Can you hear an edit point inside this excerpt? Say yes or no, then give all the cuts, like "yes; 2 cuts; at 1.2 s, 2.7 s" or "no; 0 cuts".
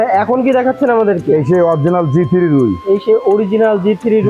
no; 0 cuts